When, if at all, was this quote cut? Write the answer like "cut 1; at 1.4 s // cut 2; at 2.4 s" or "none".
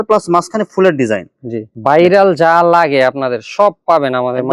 cut 1; at 1.7 s